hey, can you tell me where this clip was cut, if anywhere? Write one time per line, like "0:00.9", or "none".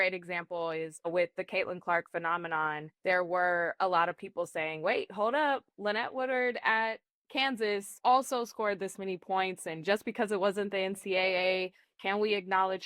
0:01.1
0:07.9

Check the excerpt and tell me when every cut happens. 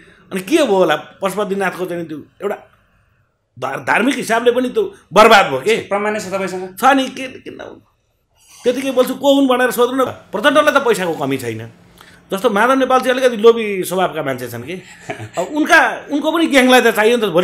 0:10.1

